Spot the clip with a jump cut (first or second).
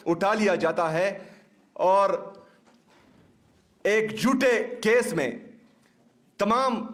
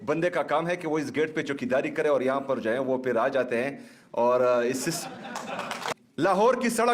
second